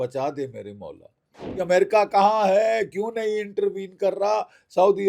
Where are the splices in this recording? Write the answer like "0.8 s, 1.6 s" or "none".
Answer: 1.5 s